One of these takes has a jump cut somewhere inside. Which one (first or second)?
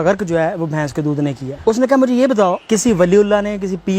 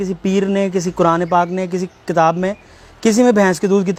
first